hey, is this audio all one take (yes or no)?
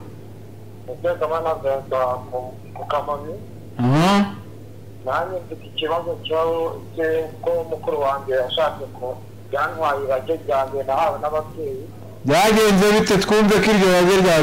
yes